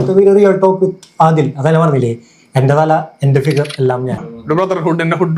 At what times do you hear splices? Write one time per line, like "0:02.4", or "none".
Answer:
0:04.4